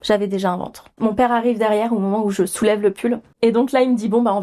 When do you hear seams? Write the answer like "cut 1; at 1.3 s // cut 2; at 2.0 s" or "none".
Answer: cut 1; at 0.9 s // cut 2; at 3.3 s